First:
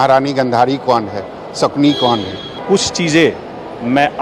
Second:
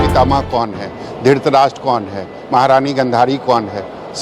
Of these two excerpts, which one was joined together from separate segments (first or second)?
first